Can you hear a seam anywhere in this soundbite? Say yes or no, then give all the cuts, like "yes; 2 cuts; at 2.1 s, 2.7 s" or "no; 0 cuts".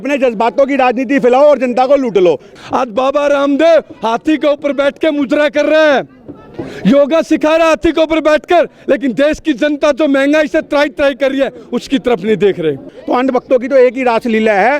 yes; 2 cuts; at 2.5 s, 12.9 s